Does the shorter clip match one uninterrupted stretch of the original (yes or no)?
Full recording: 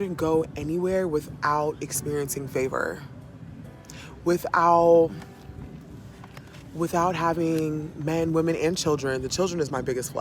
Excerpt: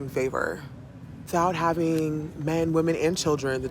no